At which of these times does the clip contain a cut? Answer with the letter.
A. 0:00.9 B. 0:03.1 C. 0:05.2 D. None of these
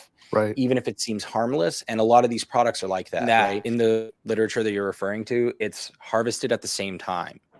B